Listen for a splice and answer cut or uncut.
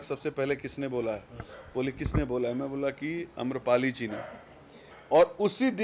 uncut